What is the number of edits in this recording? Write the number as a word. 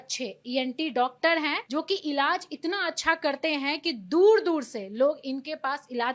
one